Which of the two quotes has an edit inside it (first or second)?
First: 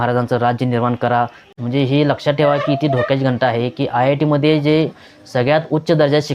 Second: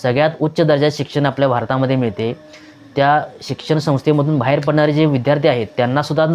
first